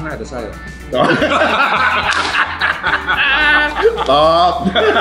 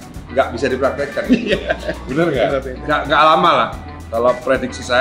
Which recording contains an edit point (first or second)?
second